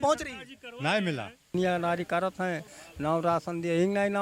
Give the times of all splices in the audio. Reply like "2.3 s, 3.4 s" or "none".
1.5 s